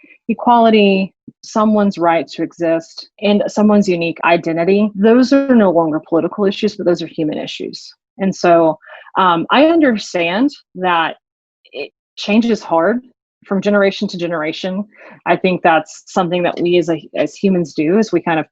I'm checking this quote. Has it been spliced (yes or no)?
yes